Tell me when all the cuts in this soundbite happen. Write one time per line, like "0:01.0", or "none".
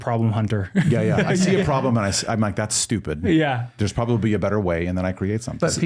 none

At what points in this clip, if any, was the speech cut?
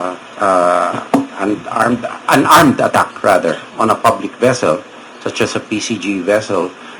none

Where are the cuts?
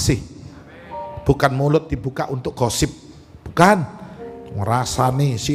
none

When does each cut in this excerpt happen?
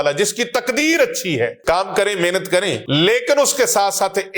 0:01.6
0:02.8

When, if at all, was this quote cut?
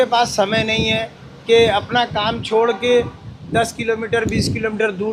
none

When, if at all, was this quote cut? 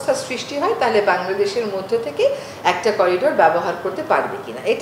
none

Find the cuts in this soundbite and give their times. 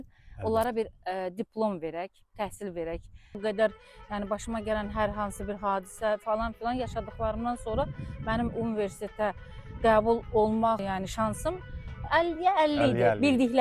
0:03.3
0:10.8

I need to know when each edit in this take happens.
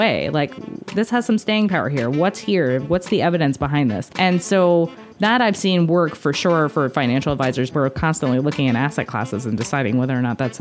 0:04.1
0:07.7

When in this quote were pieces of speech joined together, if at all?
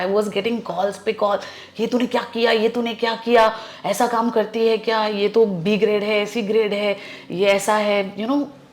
none

